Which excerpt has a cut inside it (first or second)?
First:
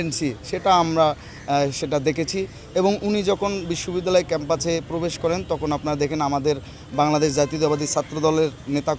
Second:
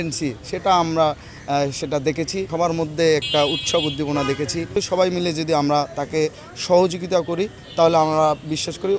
second